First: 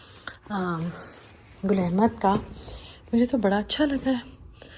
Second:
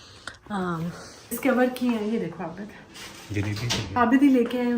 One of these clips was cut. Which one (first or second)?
second